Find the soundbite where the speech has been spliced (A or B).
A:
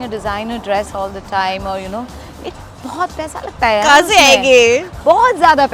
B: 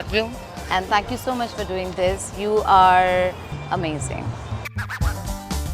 B